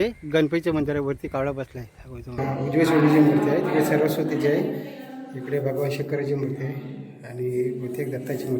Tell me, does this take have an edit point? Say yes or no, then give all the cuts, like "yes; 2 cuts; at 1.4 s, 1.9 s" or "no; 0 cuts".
yes; 1 cut; at 2.4 s